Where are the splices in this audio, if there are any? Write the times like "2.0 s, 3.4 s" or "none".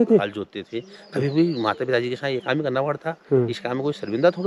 none